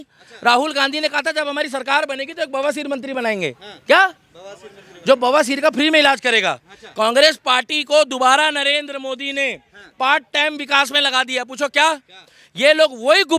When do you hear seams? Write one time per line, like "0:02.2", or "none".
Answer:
none